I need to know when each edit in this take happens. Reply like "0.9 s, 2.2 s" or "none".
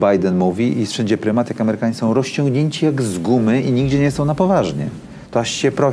none